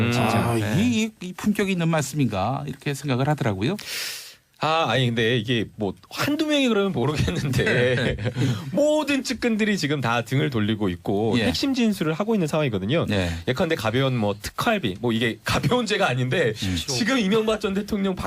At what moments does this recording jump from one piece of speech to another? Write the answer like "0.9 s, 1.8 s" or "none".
9.5 s